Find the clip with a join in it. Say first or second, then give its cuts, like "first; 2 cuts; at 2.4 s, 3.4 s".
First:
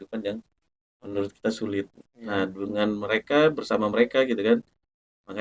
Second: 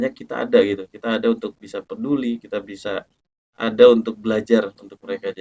first; 1 cut; at 2.0 s